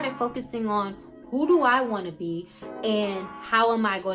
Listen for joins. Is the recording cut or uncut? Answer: uncut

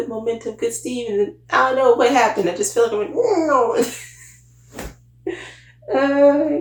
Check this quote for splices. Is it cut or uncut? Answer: uncut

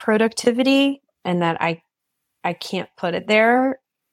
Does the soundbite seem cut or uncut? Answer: uncut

